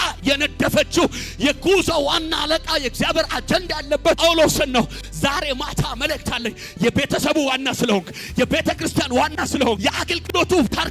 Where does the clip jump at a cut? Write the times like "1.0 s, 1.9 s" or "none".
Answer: none